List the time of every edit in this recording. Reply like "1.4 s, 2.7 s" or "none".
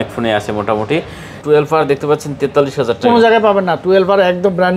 1.3 s